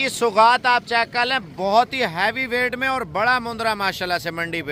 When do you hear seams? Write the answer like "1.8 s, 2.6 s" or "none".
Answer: none